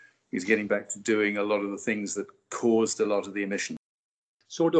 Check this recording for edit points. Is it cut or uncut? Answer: cut